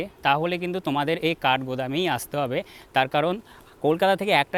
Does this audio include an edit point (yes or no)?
no